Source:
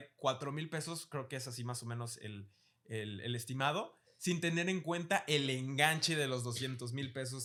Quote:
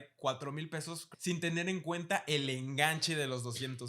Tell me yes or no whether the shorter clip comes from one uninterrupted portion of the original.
no